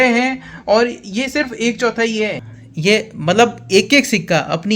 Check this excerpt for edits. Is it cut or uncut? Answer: cut